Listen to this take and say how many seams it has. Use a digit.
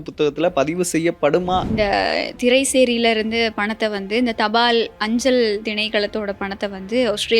1